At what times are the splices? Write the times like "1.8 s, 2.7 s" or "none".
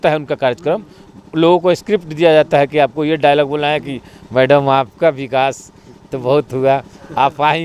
none